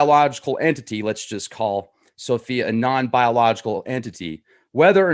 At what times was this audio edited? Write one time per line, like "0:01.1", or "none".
none